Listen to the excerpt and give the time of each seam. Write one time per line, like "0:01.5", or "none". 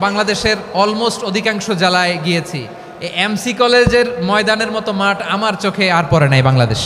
none